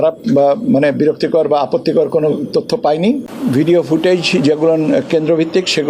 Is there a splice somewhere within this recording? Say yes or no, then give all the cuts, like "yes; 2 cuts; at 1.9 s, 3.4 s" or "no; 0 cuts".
yes; 1 cut; at 3.3 s